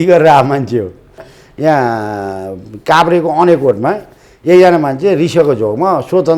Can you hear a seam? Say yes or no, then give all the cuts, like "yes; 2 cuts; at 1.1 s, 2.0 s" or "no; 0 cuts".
yes; 1 cut; at 1.3 s